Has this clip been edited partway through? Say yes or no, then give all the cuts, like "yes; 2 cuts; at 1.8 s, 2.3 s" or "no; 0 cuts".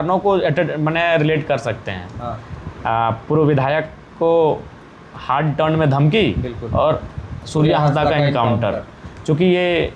no; 0 cuts